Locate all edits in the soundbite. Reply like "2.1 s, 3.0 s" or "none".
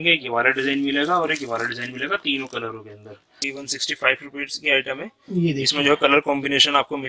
3.4 s

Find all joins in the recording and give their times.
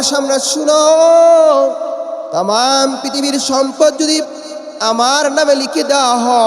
2.2 s

